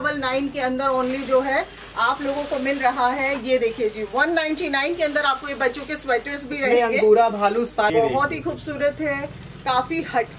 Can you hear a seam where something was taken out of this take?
yes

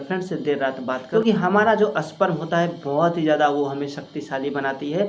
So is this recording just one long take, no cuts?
no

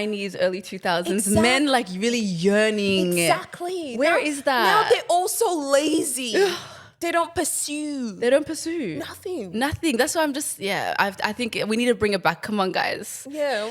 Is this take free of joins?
yes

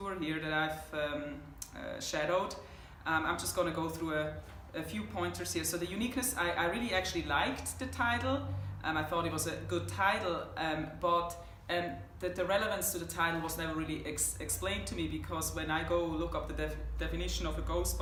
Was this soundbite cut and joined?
no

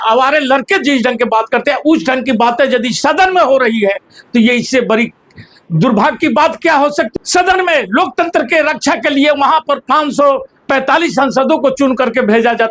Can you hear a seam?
no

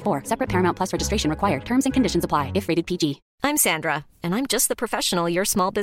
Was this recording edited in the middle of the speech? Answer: yes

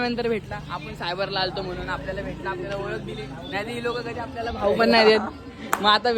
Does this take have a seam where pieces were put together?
no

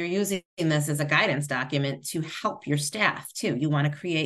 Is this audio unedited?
yes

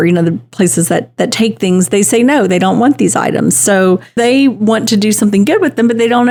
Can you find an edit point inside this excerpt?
no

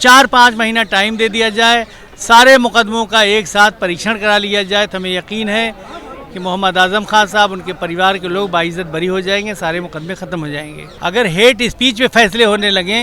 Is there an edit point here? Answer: yes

